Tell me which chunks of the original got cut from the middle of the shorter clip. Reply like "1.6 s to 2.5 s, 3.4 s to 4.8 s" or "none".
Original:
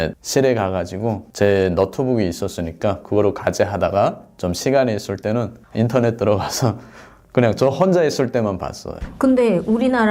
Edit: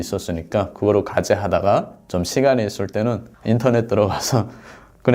none